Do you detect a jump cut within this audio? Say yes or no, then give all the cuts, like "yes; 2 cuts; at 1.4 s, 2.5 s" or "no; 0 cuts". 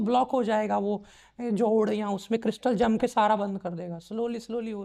no; 0 cuts